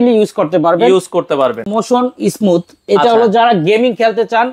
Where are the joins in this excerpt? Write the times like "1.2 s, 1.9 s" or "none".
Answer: 1.7 s